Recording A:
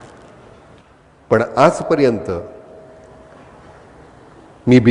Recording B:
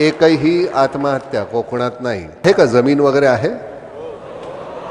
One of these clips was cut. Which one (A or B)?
B